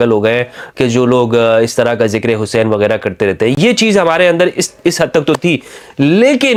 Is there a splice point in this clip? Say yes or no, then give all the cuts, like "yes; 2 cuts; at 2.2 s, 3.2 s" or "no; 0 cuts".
no; 0 cuts